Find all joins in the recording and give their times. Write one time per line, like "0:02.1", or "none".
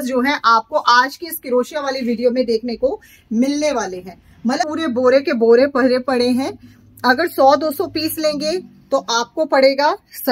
0:04.7